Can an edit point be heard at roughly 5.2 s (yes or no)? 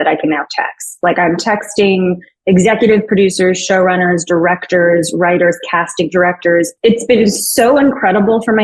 no